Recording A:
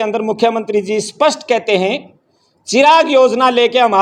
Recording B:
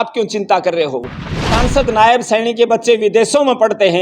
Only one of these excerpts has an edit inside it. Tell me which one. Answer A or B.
B